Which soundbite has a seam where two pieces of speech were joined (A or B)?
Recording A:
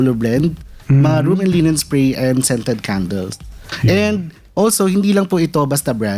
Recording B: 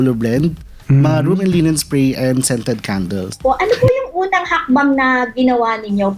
B